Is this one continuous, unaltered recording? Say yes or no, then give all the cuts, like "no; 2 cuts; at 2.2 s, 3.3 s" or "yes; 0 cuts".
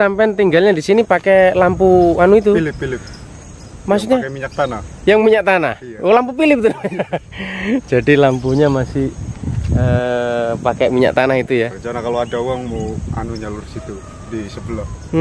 yes; 0 cuts